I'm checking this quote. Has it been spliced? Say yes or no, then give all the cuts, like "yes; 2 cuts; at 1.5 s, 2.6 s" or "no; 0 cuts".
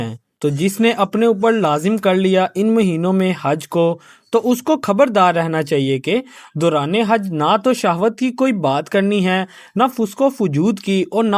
no; 0 cuts